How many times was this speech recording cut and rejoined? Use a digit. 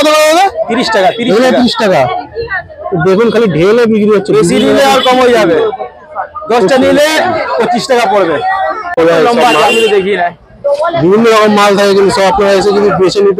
1